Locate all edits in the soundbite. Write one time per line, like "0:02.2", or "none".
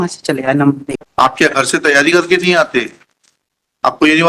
0:00.9